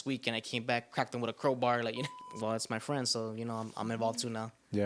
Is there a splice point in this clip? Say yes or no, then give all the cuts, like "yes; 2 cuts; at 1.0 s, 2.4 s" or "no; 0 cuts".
yes; 1 cut; at 2.1 s